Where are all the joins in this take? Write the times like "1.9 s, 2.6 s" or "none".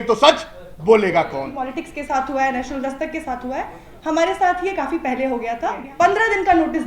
1.6 s, 5.8 s